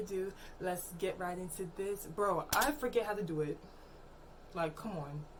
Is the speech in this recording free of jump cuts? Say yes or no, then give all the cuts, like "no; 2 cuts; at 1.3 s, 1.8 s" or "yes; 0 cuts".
yes; 0 cuts